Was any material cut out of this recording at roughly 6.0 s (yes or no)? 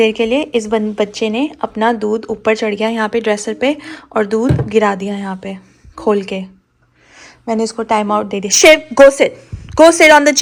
no